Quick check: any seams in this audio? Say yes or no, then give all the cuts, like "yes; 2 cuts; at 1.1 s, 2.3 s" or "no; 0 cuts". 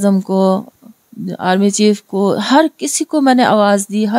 no; 0 cuts